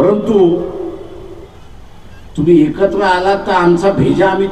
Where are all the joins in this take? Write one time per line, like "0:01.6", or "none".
0:01.6